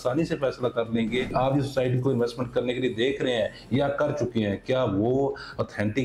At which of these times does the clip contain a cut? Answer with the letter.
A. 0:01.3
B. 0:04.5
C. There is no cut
A